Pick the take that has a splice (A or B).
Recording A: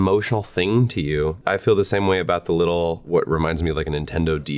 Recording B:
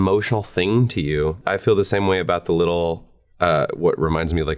A